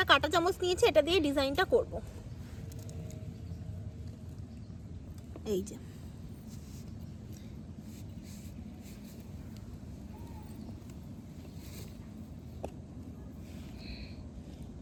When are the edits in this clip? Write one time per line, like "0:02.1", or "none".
none